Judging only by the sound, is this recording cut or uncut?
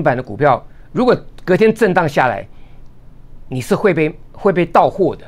uncut